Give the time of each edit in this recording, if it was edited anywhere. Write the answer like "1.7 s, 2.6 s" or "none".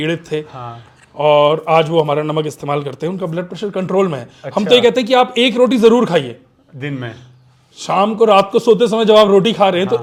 none